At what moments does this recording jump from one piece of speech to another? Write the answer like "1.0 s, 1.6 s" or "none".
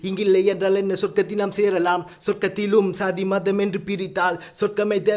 none